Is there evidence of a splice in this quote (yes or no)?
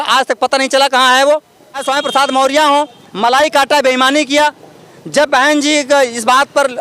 yes